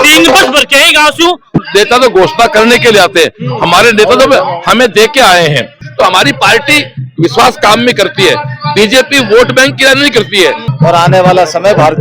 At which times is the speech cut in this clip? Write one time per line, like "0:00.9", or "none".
0:01.5
0:05.7
0:10.7